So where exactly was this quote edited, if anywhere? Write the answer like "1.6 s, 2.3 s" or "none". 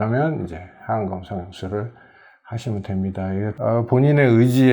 3.5 s